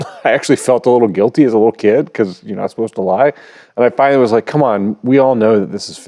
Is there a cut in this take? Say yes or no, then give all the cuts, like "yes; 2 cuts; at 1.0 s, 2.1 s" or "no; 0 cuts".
no; 0 cuts